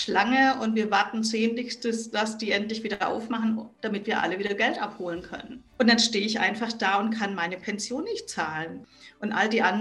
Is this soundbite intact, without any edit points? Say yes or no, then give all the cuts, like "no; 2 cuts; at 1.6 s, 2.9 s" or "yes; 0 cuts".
no; 2 cuts; at 5.6 s, 8.8 s